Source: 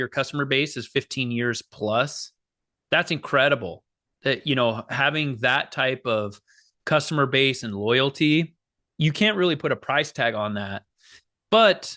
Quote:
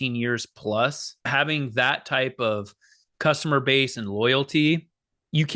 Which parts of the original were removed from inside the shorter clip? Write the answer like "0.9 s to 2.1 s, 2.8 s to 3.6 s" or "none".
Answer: 2.4 s to 4.9 s